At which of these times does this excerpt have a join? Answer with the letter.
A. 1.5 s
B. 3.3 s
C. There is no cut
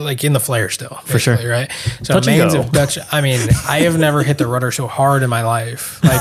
C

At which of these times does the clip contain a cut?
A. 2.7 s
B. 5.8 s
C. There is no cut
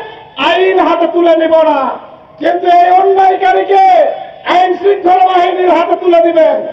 C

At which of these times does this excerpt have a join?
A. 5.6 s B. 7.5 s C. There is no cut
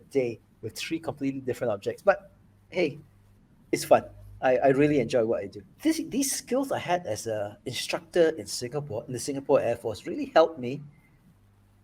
A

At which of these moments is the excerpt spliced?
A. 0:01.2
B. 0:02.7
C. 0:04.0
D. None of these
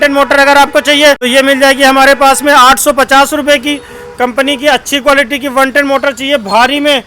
A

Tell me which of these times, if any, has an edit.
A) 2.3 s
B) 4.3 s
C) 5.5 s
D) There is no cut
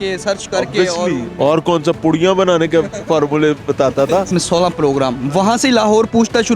B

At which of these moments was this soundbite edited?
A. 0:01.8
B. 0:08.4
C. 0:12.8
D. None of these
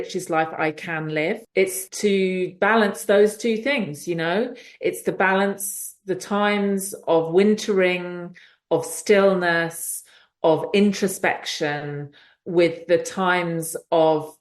A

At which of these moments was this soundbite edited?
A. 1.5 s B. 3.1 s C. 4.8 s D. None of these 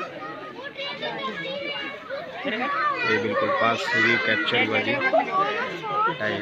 D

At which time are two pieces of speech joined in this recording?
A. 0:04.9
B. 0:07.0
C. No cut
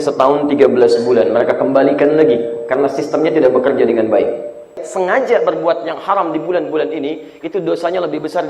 A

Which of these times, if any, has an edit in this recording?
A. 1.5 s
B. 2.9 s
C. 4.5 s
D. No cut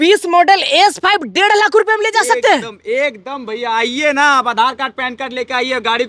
D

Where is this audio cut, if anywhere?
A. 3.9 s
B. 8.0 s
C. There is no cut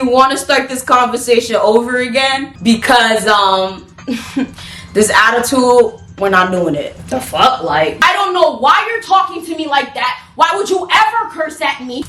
B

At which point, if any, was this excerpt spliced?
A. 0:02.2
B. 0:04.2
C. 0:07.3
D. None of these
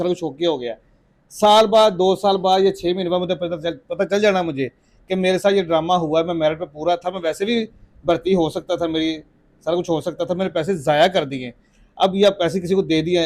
D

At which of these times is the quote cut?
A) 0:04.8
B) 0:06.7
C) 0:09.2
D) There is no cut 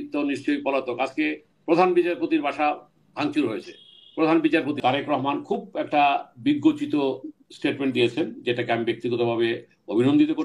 A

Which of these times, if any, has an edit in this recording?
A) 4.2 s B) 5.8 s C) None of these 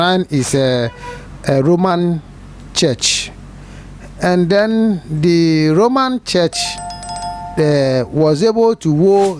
C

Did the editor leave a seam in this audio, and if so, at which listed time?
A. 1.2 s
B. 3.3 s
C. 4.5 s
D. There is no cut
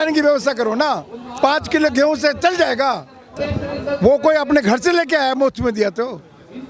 B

